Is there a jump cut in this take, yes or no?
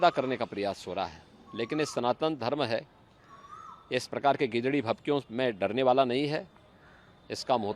no